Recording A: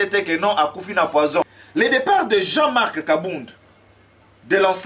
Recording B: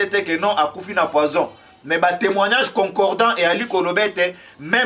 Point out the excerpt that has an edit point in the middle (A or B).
A